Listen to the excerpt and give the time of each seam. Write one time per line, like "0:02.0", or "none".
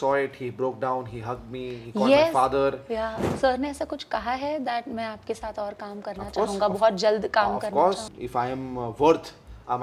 0:03.2
0:08.1